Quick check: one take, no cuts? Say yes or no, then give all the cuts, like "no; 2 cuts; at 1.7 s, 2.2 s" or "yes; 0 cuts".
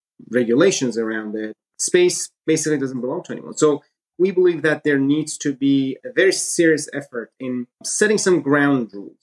no; 1 cut; at 7.8 s